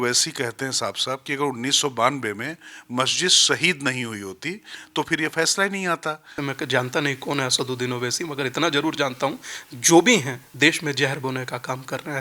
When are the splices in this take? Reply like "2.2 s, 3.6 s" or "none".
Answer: 6.4 s, 10.4 s